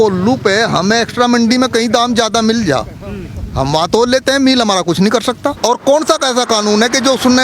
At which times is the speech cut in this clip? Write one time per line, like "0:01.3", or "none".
0:05.6